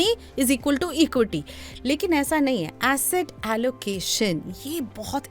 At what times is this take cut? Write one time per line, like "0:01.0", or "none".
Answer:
none

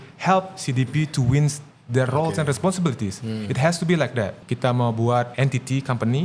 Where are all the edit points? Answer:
0:04.4
0:05.3

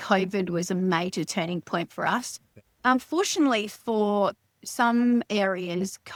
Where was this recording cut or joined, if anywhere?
none

